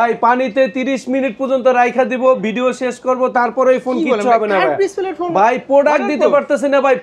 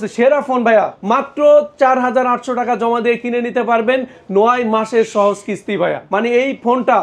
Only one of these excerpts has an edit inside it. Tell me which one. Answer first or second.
second